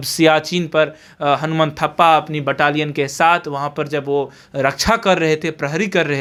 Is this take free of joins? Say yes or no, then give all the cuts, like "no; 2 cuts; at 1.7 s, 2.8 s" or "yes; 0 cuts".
yes; 0 cuts